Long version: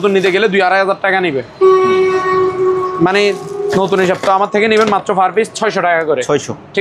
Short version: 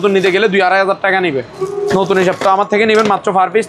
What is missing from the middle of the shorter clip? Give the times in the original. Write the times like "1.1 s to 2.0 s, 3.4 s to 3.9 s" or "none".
1.6 s to 3.4 s